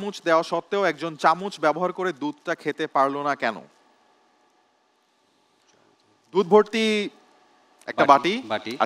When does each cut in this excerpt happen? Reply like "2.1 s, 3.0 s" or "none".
none